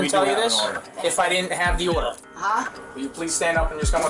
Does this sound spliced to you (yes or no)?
yes